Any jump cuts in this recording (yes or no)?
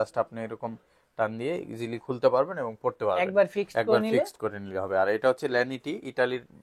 no